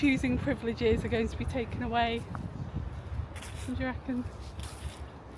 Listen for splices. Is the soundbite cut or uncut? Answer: uncut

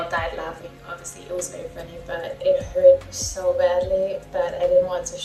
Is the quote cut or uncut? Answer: uncut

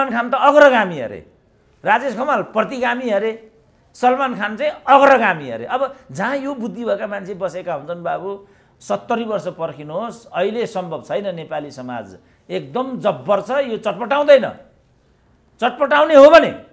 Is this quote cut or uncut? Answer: uncut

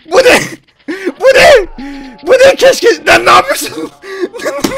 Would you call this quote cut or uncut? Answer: uncut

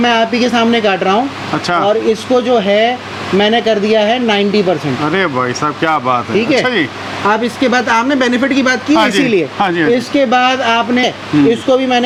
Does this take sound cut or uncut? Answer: uncut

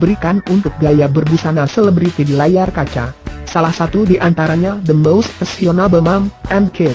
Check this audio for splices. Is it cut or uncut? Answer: uncut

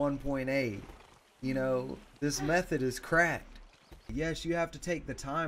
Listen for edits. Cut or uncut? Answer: cut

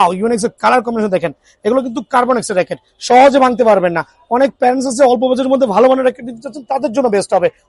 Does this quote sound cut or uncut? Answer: uncut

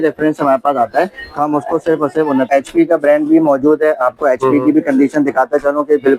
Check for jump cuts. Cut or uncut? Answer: cut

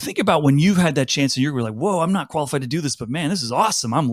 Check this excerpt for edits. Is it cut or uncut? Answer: uncut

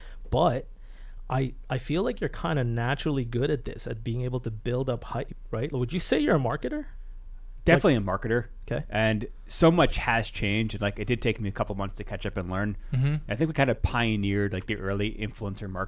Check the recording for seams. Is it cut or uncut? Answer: uncut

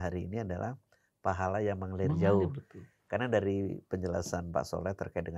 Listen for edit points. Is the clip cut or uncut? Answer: uncut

